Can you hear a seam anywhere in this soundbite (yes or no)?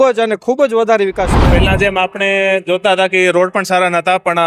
yes